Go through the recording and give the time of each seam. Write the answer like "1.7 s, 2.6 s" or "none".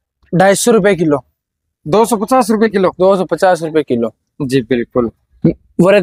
none